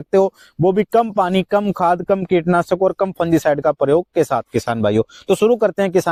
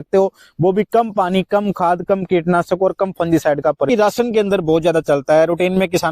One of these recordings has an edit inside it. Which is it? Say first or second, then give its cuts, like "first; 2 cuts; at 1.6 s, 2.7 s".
second; 1 cut; at 3.9 s